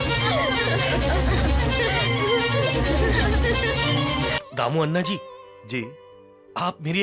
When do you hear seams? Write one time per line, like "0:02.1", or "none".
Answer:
0:04.4